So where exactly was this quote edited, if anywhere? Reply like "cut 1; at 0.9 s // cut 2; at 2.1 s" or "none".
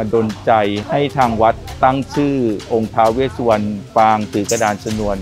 cut 1; at 3.8 s